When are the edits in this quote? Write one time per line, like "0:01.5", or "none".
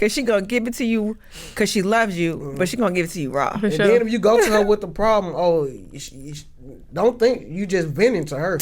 none